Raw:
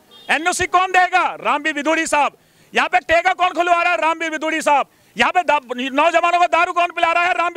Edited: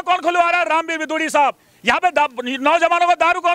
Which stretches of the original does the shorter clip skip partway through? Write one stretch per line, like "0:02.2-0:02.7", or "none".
none